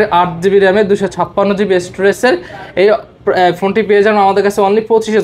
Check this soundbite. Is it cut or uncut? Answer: uncut